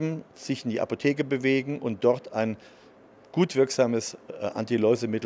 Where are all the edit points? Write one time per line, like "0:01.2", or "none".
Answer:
0:02.3